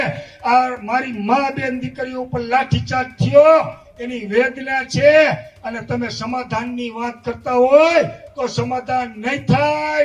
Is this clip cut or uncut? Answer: uncut